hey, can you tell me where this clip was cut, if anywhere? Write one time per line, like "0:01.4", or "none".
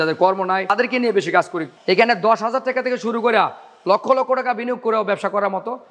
0:00.7
0:01.7